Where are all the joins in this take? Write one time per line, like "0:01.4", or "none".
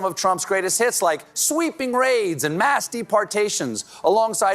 none